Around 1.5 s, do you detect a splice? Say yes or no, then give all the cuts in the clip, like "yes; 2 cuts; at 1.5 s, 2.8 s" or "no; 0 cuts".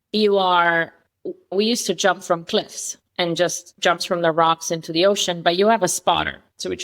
yes; 1 cut; at 1.5 s